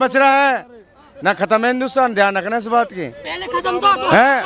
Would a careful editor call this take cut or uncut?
uncut